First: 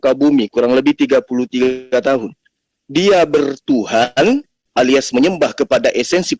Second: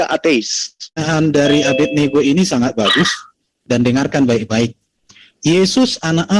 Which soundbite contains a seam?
second; 1 cut; at 1.0 s

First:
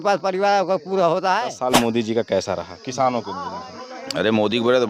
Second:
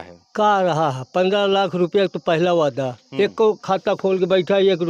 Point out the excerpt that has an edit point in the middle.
first; 1 cut; at 1.6 s

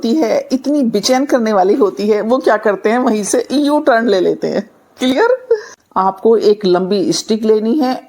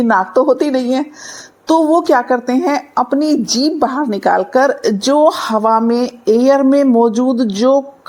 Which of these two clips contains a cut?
first; 1 cut; at 5.8 s

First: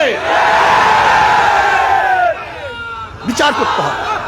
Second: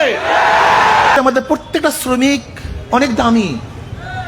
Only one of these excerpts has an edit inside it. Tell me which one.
second; 1 cut; at 1.2 s

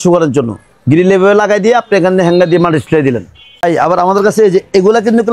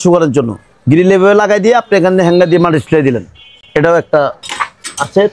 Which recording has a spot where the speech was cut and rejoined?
first; 1 cut; at 3.6 s

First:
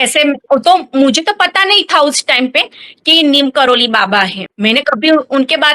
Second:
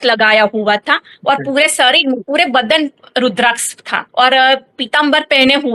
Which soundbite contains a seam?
first; 1 cut; at 4.4 s

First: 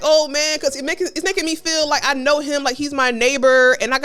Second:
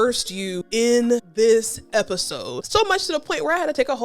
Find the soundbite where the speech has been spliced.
second; 2 cuts; at 0.9 s, 2.6 s

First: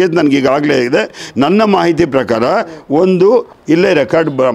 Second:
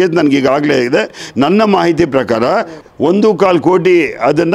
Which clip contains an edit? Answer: second; 1 cut; at 2.8 s

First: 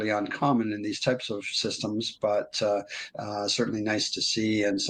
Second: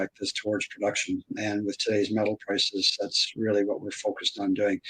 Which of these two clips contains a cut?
second; 1 cut; at 1.4 s

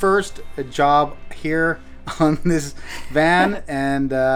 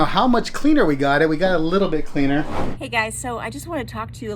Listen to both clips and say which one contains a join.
second; 1 cut; at 2.8 s

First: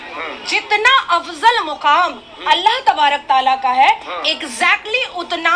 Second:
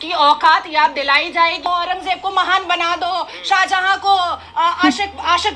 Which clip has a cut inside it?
second; 1 cut; at 1.7 s

